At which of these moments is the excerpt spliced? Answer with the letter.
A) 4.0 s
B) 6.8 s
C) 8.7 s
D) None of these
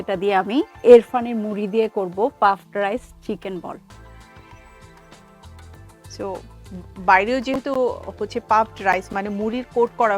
A